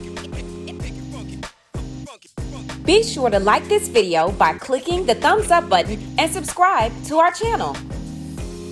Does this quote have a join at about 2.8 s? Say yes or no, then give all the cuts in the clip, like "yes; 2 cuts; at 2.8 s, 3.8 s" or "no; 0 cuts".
yes; 2 cuts; at 2.8 s, 7.7 s